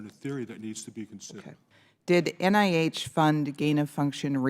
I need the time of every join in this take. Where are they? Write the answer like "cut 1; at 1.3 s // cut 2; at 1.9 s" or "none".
cut 1; at 1.5 s